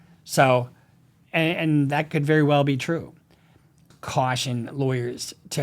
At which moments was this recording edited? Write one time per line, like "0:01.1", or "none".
0:03.9